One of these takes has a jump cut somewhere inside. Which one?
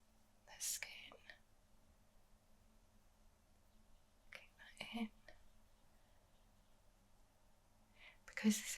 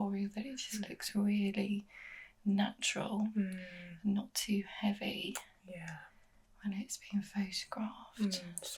first; 1 cut; at 3.6 s

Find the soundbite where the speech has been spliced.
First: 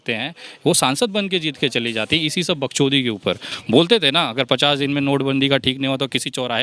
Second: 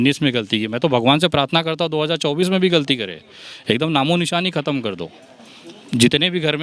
first; 1 cut; at 3.5 s

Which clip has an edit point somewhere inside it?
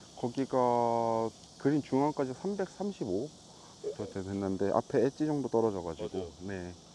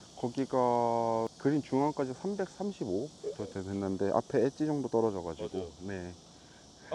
second; 2 cuts; at 1.3 s, 3.1 s

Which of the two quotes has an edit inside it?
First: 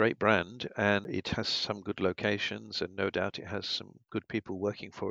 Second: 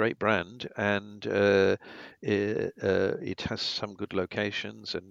first; 1 cut; at 1.1 s

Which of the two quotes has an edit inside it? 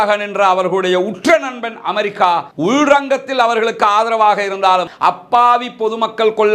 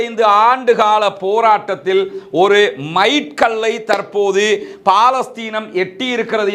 first; 1 cut; at 4.9 s

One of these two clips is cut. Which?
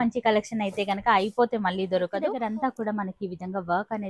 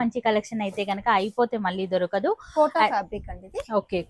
first; 1 cut; at 2.3 s

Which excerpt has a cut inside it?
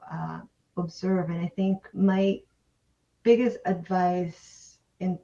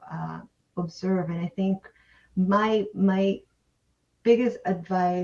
first; 1 cut; at 1.9 s

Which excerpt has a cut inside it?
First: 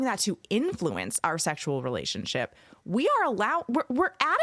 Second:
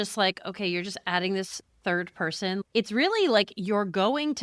second; 1 cut; at 2.6 s

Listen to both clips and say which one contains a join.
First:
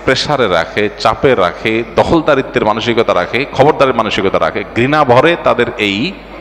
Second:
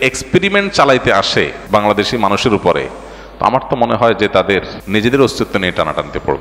second; 2 cuts; at 1.6 s, 4.8 s

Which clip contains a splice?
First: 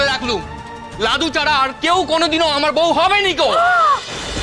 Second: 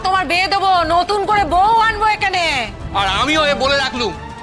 second; 1 cut; at 2.8 s

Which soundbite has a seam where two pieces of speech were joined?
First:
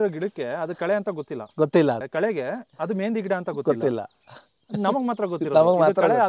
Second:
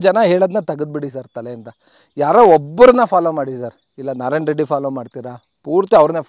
first; 1 cut; at 2.1 s

